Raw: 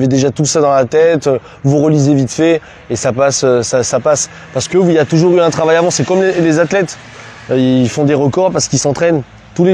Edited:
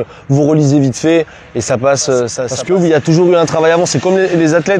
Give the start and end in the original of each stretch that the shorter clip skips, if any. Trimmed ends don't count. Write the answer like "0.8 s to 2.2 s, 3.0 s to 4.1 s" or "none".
3.8 s to 4.5 s